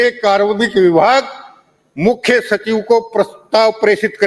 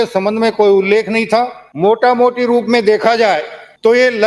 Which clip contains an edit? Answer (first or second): second